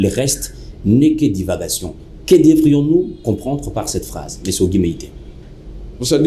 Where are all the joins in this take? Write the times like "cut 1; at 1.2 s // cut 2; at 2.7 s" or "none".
none